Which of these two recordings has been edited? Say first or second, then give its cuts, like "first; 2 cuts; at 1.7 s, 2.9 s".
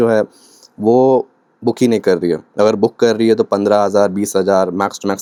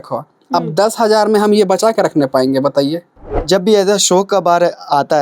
second; 1 cut; at 3.3 s